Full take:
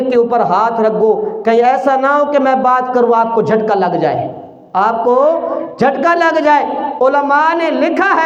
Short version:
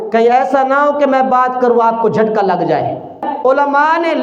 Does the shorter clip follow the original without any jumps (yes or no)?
no